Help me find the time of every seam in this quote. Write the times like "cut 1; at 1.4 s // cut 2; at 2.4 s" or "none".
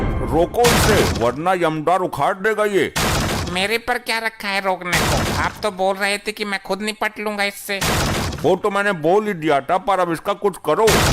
none